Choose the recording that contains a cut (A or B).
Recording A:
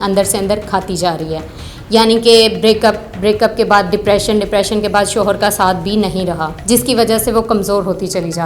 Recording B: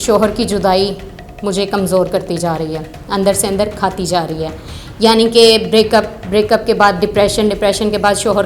A